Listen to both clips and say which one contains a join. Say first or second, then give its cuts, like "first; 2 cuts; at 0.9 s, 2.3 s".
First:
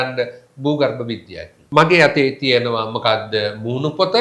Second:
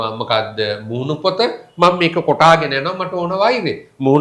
first; 1 cut; at 1.5 s